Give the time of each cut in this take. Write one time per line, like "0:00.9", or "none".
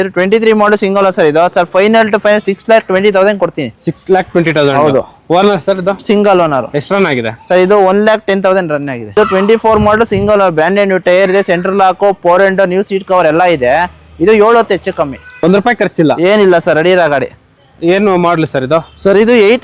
0:09.1
0:15.2